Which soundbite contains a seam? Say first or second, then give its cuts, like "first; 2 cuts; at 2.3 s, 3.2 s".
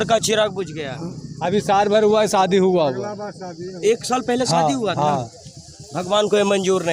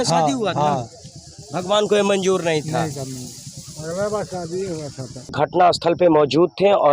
second; 1 cut; at 5.3 s